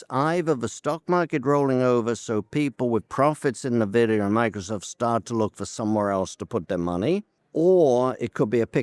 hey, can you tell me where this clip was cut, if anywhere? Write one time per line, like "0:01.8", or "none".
0:07.4